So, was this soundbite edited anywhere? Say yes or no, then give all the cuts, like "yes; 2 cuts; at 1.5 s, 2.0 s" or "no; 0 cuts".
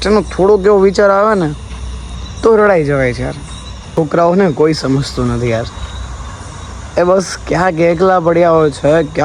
yes; 1 cut; at 3.9 s